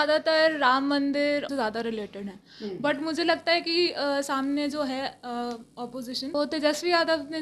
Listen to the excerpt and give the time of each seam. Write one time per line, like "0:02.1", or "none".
0:01.5
0:06.3